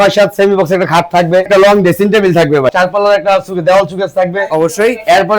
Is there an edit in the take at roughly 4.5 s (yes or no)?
no